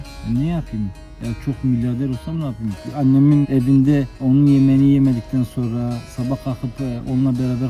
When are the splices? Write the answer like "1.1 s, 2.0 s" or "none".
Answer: 2.9 s, 3.6 s